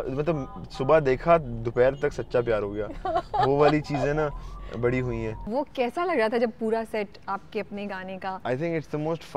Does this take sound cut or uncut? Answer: cut